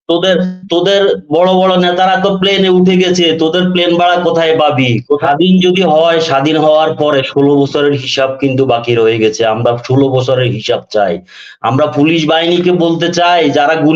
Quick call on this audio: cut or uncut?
cut